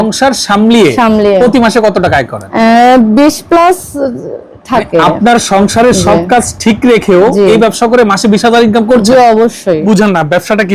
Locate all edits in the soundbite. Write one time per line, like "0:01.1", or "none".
0:02.4
0:09.8